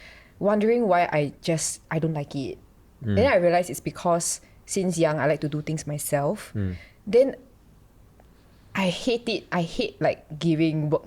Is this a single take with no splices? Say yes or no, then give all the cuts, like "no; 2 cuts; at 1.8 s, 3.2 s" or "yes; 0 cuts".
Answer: yes; 0 cuts